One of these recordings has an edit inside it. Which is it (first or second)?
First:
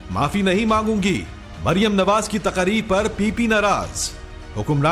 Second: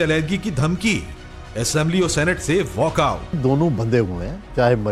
second